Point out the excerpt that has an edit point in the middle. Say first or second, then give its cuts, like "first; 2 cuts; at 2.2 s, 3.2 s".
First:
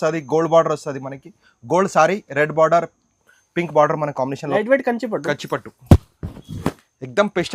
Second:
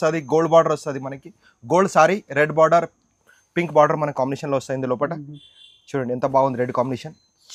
first; 1 cut; at 4.5 s